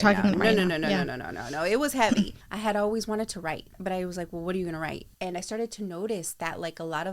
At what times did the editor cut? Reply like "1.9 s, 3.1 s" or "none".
2.4 s, 3.7 s, 5.0 s